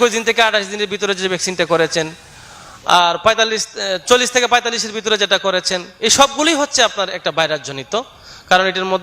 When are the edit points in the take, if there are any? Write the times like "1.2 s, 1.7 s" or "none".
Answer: none